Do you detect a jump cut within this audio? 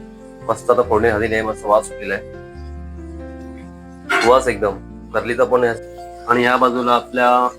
yes; 1 cut; at 5.8 s

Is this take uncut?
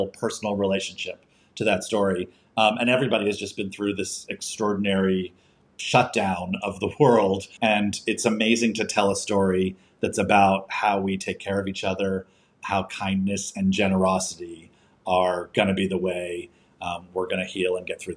no; 1 cut; at 7.5 s

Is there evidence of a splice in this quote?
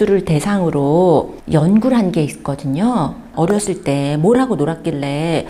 no; 0 cuts

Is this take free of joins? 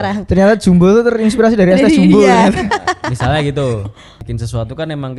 no; 1 cut; at 4.3 s

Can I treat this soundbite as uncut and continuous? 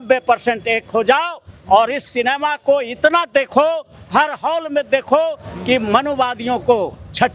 yes; 0 cuts

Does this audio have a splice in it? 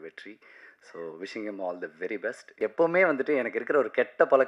yes; 1 cut; at 2.5 s

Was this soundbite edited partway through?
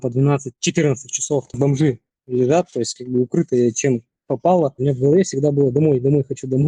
yes; 2 cuts; at 1.5 s, 4.8 s

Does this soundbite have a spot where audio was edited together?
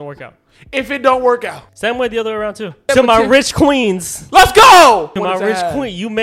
yes; 3 cuts; at 1.7 s, 2.8 s, 5.2 s

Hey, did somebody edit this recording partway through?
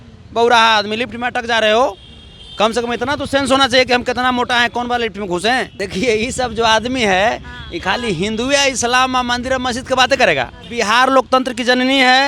yes; 2 cuts; at 5.8 s, 10.6 s

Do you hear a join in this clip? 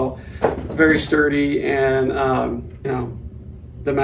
yes; 1 cut; at 2.7 s

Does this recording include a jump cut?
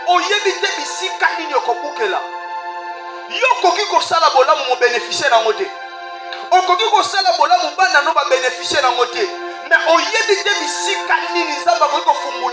no; 0 cuts

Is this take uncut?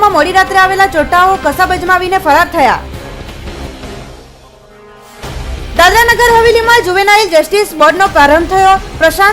yes; 0 cuts

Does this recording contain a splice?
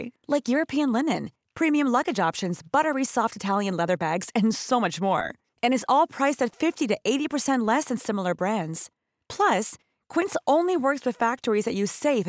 no; 0 cuts

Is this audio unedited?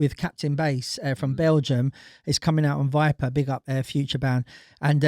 yes; 0 cuts

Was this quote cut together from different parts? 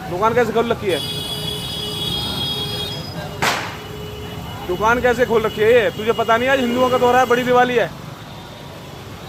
no; 0 cuts

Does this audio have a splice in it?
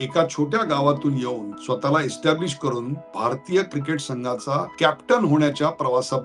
yes; 3 cuts; at 1.5 s, 3.0 s, 4.7 s

